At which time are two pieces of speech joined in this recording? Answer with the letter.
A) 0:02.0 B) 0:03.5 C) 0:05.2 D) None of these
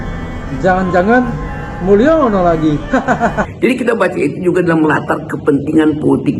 B